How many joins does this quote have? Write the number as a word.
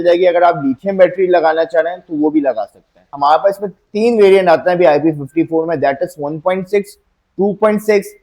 one